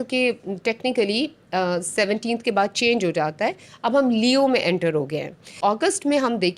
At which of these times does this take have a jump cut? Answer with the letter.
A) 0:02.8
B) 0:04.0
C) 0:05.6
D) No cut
C